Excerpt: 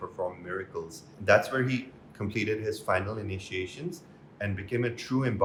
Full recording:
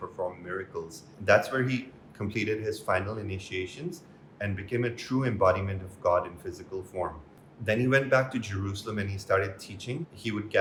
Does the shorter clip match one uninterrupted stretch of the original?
yes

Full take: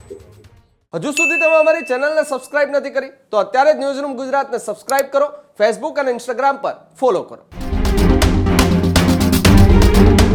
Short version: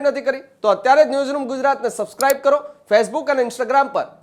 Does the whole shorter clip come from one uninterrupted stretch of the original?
yes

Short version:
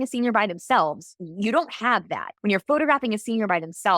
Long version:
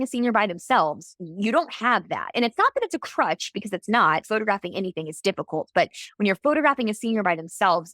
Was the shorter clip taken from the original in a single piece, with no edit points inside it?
no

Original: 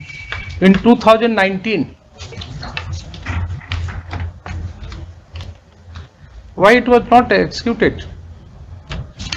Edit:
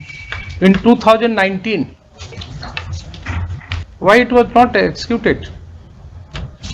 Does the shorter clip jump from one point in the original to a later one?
yes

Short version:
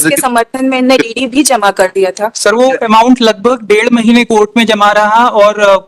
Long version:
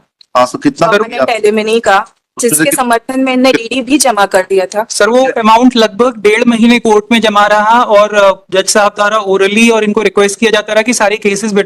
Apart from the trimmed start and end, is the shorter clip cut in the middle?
no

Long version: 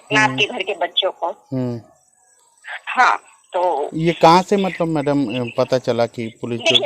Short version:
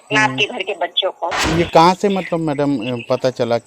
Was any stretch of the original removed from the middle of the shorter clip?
yes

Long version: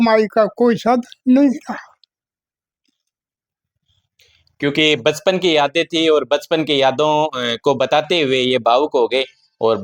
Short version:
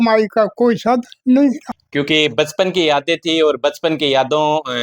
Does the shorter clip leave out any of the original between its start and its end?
yes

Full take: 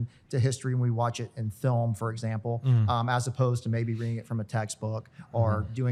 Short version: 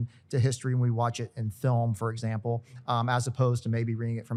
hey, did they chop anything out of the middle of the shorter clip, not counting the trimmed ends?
no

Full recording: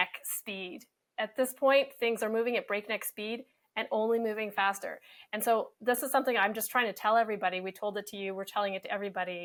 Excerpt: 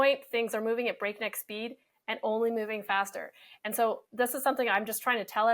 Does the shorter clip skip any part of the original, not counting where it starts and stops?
no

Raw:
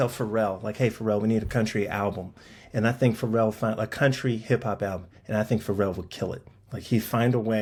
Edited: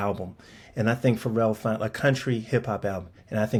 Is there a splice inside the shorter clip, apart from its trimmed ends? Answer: no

